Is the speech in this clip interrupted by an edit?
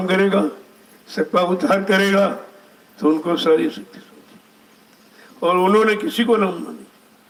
no; 0 cuts

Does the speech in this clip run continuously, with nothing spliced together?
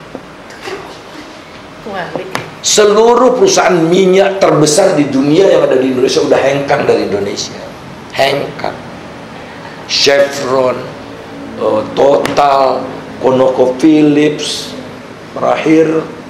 yes; 0 cuts

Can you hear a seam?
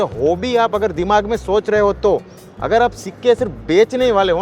no; 0 cuts

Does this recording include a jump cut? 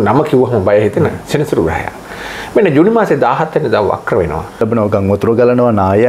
yes; 1 cut; at 4.6 s

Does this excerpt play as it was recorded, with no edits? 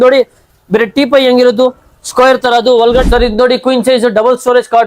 no; 1 cut; at 3.0 s

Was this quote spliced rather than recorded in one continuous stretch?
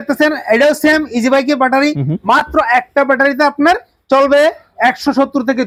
no; 0 cuts

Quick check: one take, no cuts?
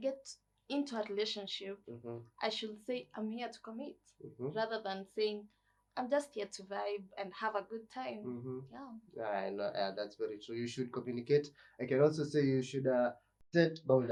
yes; 0 cuts

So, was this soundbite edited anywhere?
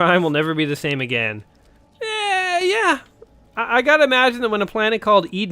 no; 0 cuts

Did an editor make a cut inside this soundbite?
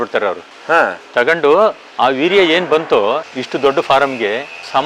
yes; 1 cut; at 3.3 s

